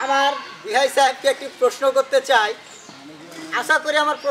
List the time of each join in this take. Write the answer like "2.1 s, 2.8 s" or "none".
none